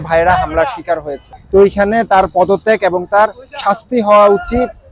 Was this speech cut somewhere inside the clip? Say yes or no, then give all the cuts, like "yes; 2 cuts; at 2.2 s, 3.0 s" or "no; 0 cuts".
no; 0 cuts